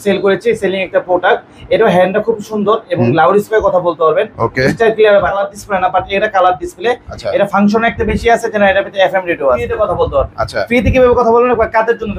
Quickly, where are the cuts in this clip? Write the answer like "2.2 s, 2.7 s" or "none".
5.5 s, 9.7 s